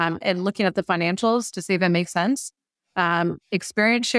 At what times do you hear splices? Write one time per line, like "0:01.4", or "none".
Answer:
none